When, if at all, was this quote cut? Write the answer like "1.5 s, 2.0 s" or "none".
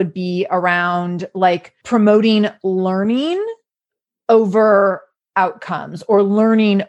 1.7 s

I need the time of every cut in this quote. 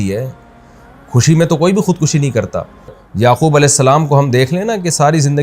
3.0 s

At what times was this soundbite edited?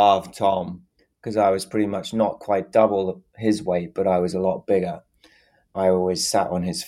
5.7 s

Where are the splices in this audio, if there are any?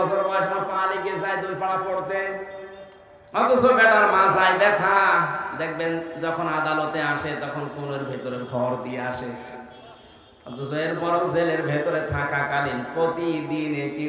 none

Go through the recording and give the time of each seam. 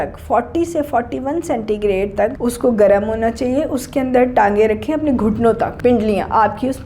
2.4 s, 5.7 s

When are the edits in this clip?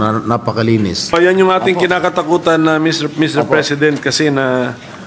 1.1 s

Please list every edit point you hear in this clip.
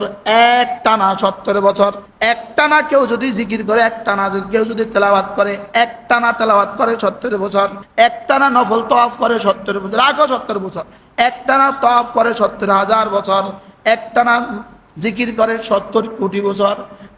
2.1 s, 7.8 s

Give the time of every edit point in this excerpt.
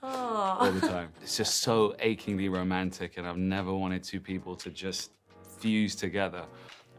1.1 s

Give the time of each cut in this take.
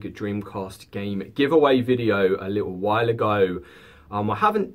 none

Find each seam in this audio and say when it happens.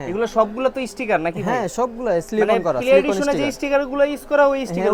none

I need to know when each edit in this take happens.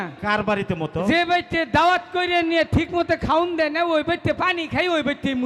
none

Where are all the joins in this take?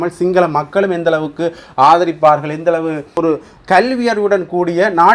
3.2 s

